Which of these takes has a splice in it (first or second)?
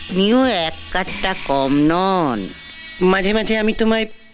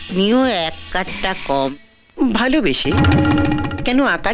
second